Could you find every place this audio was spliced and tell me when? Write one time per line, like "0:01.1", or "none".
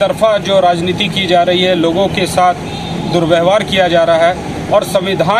none